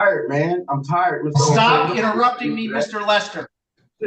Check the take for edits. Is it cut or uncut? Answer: uncut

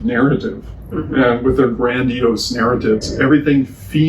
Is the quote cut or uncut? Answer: cut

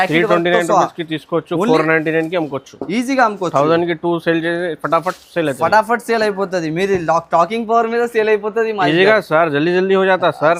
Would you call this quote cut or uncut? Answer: uncut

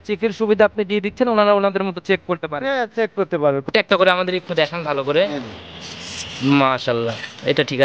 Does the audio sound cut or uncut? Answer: cut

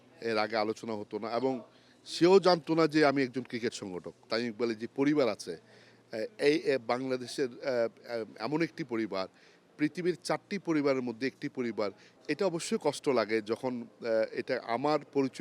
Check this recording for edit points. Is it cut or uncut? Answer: cut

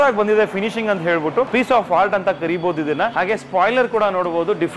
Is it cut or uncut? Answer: cut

